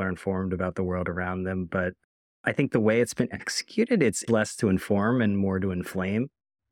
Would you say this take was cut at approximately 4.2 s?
yes; 1 cut; at 4.2 s

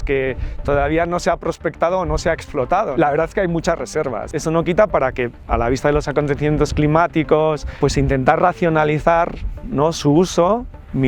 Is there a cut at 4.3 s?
yes; 3 cuts; at 2.9 s, 4.3 s, 7.7 s

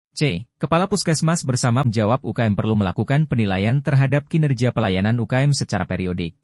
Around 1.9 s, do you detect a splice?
yes; 1 cut; at 1.9 s

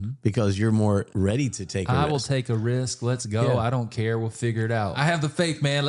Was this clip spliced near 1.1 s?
yes; 2 cuts; at 1.1 s, 5.0 s

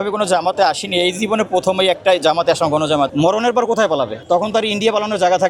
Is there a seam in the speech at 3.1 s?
yes; 1 cut; at 3.1 s

